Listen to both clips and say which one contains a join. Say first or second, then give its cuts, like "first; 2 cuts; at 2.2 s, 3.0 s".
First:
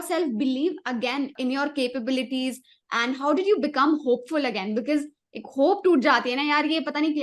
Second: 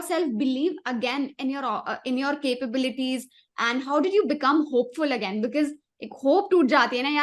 first; 1 cut; at 1.3 s